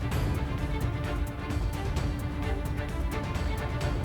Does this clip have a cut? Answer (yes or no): no